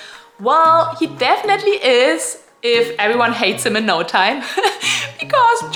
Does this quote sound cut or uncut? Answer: uncut